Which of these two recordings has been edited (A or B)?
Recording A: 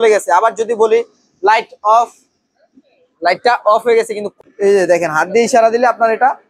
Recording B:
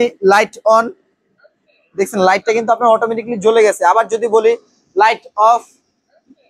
A